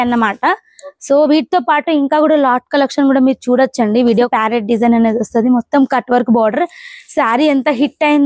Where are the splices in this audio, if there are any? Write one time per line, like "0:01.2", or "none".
0:04.3